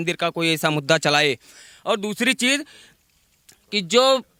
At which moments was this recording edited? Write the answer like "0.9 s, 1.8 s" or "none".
none